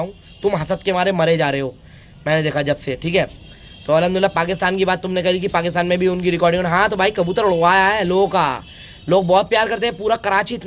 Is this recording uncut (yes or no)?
yes